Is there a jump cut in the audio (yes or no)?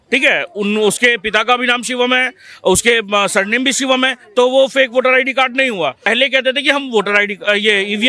yes